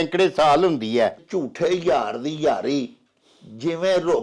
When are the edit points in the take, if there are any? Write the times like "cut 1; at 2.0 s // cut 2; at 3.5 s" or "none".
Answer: cut 1; at 1.2 s